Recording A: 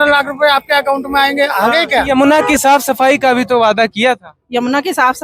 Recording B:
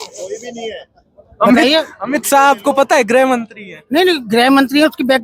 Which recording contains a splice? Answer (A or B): A